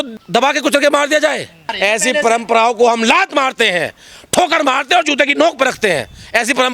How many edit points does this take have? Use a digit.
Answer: 1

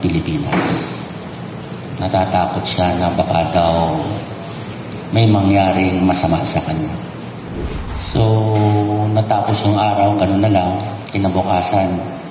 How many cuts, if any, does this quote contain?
1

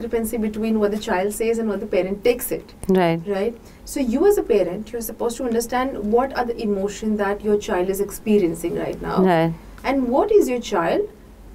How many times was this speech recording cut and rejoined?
0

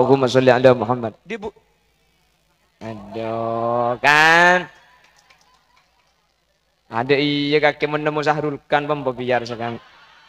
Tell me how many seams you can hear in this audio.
1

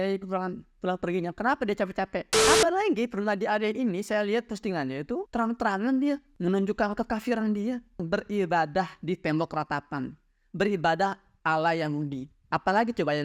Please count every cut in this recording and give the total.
3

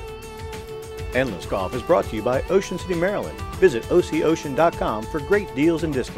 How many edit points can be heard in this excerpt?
1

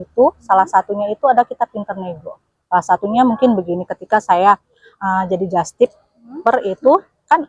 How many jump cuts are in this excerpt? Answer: 0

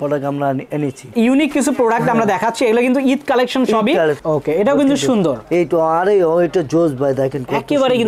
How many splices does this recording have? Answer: 2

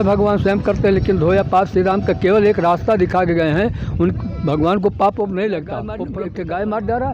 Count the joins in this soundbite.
1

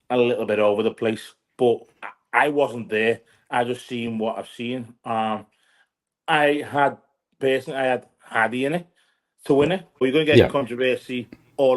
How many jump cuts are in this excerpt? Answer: 1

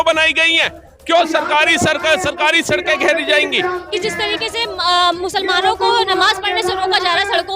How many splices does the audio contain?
1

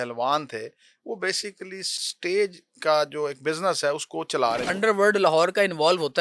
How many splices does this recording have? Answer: 2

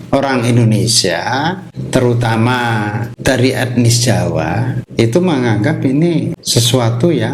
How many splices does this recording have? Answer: 4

